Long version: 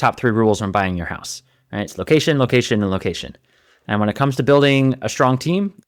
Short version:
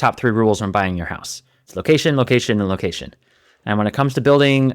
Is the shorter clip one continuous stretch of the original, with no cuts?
no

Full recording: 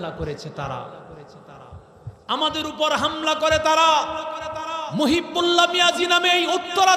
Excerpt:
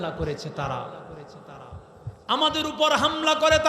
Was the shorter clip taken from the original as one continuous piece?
yes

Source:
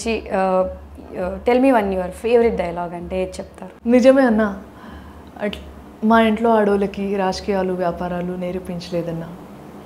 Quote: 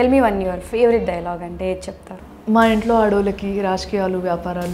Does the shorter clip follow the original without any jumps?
no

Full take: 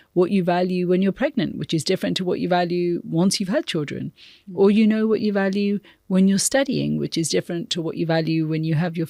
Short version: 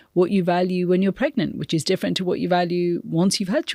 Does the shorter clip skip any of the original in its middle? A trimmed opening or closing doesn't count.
no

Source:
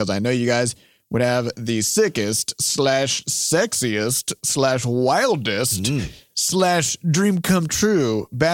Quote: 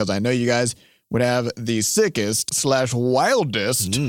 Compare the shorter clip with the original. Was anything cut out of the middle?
yes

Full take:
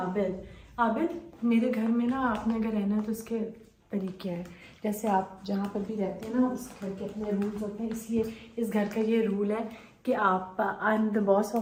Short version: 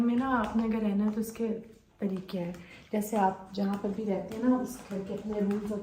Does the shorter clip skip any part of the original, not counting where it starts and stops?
no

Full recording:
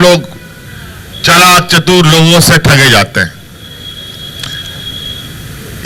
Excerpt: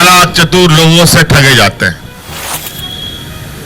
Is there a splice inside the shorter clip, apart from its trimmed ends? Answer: yes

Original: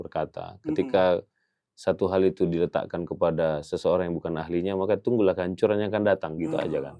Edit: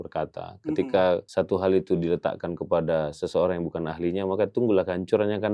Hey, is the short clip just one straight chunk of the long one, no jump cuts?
no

